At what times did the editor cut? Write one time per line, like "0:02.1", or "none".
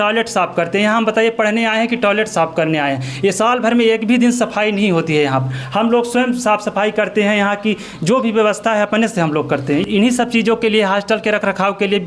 none